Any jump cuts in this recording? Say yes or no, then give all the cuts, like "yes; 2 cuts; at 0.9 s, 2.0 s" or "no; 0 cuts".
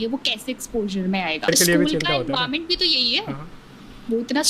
yes; 1 cut; at 1.5 s